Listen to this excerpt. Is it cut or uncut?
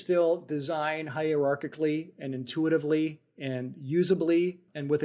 uncut